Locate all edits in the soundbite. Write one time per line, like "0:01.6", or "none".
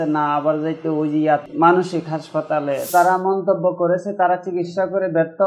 0:01.5
0:02.8